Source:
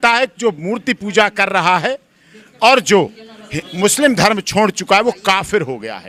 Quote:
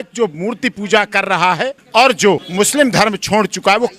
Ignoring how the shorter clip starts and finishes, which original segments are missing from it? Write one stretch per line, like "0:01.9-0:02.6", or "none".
0:02.0-0:02.5
0:03.1-0:03.7